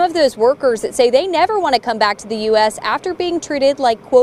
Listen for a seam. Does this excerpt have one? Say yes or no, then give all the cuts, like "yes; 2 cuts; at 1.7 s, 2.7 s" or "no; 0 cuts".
no; 0 cuts